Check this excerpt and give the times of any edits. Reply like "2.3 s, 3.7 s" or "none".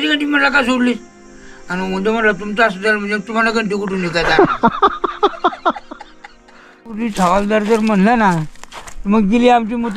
7.0 s

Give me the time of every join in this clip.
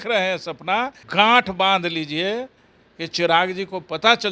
1.0 s

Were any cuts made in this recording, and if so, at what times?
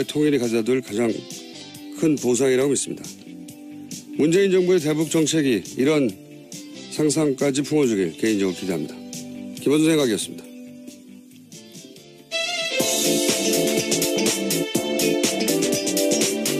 2.2 s

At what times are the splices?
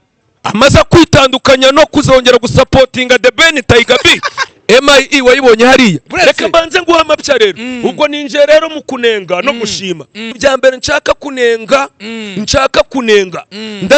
4.3 s, 6.1 s, 10.3 s

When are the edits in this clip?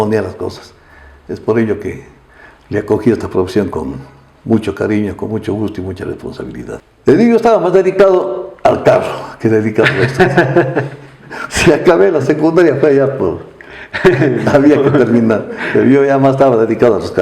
6.9 s

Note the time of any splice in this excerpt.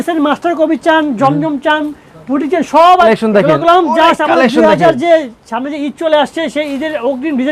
3.1 s

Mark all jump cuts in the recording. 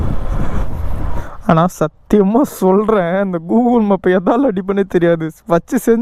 1.2 s

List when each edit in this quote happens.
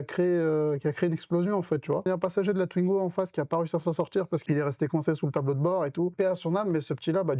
2.1 s, 4.4 s, 6.1 s

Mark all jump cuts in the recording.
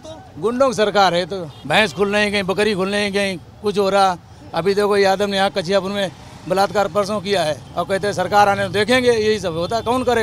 1.5 s, 7.7 s

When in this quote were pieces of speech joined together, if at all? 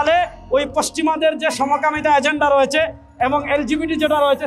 none

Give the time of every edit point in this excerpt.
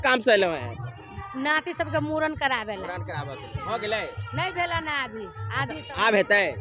none

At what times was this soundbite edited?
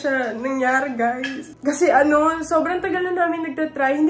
1.4 s

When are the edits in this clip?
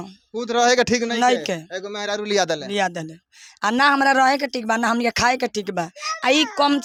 none

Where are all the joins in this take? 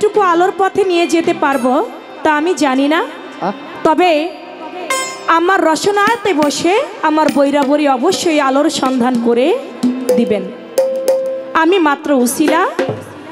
none

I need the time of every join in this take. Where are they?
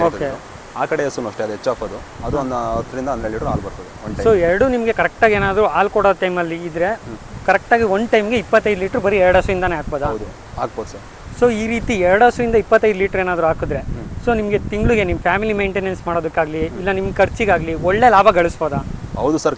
none

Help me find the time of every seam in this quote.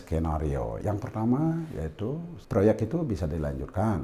0.8 s, 2.3 s

